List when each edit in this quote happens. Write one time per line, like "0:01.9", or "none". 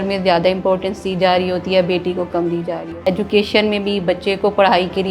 0:02.8